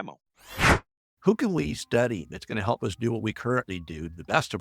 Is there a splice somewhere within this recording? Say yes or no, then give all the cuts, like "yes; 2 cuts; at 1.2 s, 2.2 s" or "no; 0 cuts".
yes; 1 cut; at 1.0 s